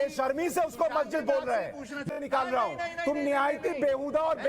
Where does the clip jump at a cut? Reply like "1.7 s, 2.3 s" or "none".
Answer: 2.1 s

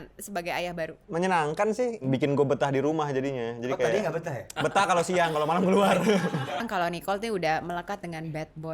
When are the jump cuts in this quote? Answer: 1.0 s, 2.0 s, 4.5 s, 6.6 s

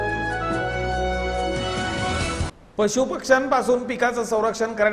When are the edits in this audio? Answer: 2.4 s

